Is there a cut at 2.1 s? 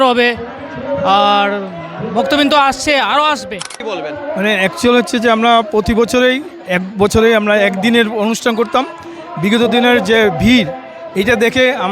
no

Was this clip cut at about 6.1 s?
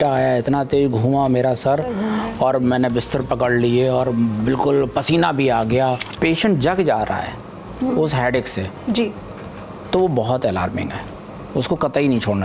yes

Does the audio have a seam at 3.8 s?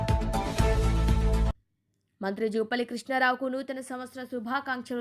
no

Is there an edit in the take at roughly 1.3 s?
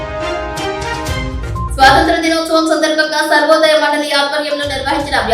no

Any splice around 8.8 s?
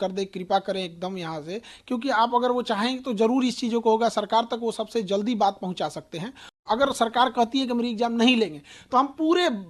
no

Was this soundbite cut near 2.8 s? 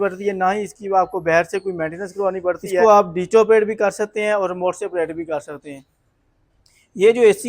yes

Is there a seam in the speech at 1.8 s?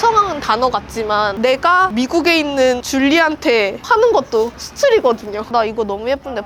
no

